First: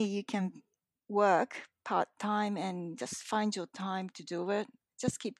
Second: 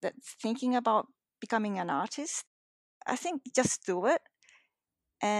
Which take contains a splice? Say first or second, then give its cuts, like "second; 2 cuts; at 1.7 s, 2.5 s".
second; 1 cut; at 3.0 s